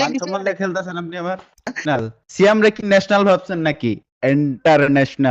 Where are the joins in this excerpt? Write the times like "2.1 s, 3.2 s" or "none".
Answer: 1.6 s